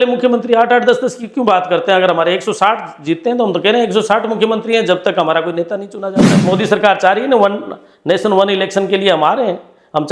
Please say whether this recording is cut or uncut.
cut